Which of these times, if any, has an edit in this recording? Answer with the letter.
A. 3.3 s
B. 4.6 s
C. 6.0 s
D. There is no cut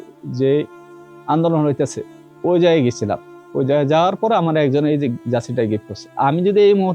C